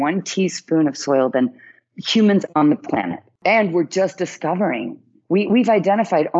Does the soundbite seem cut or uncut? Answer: cut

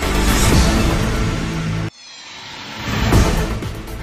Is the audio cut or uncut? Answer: uncut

